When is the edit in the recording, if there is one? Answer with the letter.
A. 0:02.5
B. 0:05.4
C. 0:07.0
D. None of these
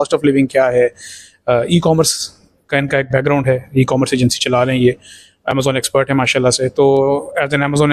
D